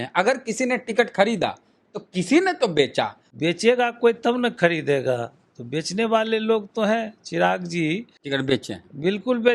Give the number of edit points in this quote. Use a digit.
2